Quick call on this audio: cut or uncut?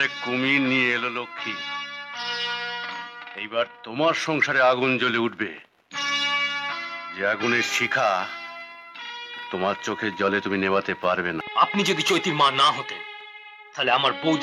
cut